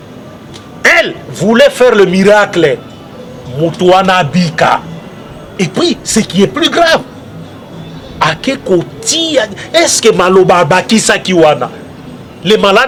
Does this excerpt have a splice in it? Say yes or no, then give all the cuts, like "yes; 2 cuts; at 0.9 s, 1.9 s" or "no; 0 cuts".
no; 0 cuts